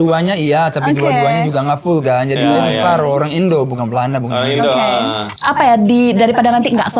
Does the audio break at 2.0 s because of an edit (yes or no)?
no